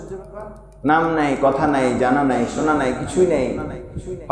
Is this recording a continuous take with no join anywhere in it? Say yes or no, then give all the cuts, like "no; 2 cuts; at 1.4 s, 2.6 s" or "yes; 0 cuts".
yes; 0 cuts